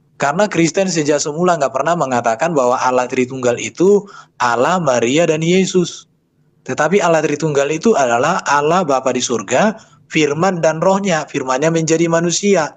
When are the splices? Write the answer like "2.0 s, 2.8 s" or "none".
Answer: none